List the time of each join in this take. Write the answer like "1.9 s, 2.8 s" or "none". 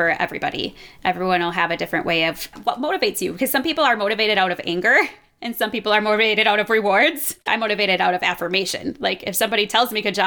2.5 s, 7.4 s